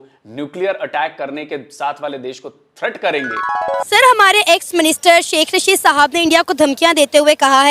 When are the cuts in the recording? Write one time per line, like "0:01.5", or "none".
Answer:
0:03.9